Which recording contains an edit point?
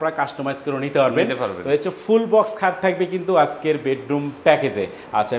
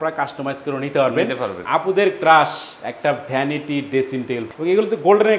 second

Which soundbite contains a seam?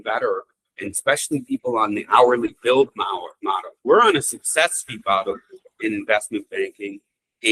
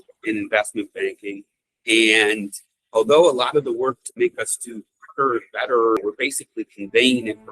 second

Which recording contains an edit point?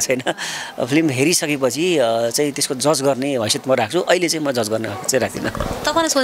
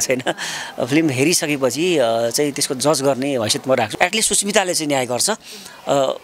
second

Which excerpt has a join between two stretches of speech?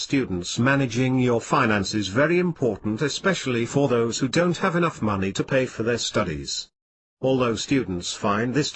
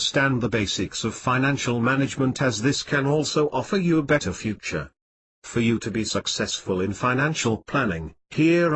second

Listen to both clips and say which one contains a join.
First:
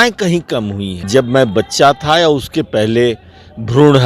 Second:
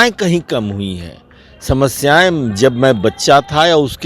first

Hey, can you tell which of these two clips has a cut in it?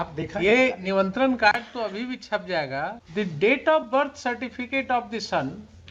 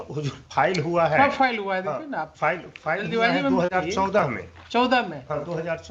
first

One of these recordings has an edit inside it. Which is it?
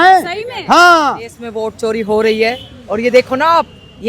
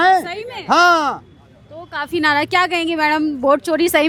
first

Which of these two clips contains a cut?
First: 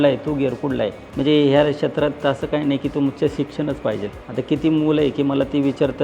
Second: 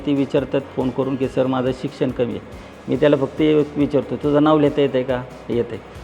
first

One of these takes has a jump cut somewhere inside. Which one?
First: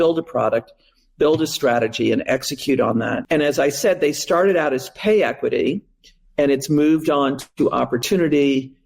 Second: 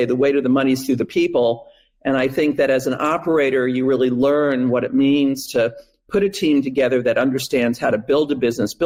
first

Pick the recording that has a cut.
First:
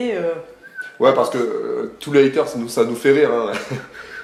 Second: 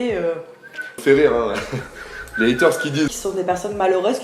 second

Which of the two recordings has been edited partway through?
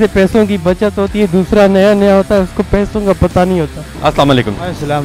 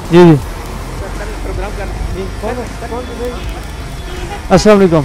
first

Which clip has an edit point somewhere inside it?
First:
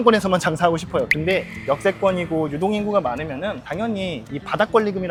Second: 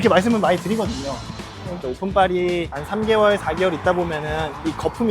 second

